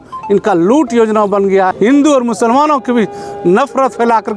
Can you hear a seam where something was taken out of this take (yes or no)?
yes